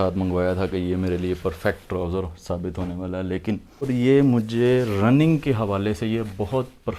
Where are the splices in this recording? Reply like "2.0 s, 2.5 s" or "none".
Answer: 3.7 s